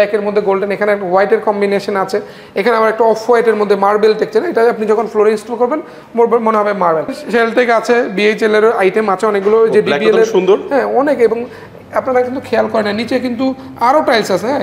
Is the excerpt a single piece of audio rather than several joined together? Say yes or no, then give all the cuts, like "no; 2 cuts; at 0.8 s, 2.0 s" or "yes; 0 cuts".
no; 1 cut; at 7.1 s